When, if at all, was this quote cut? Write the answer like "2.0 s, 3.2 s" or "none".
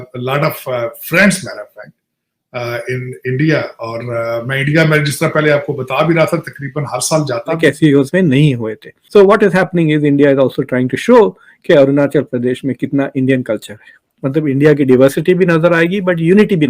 7.6 s